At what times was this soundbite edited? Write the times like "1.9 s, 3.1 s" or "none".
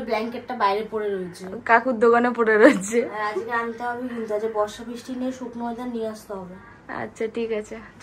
none